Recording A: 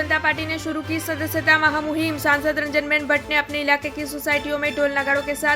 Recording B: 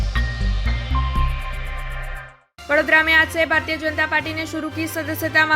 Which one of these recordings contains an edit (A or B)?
B